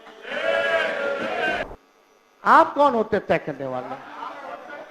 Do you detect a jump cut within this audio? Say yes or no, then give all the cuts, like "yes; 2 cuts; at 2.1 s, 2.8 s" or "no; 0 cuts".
yes; 1 cut; at 1.7 s